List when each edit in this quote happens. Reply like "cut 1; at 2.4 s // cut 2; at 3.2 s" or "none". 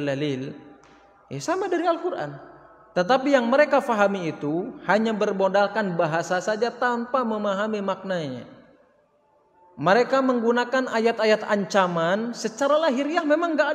none